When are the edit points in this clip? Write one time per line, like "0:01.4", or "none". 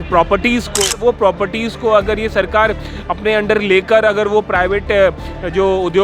0:00.9